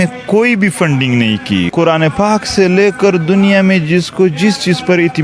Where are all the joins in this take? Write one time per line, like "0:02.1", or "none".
0:01.7